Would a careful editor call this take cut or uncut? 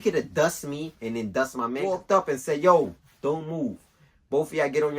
cut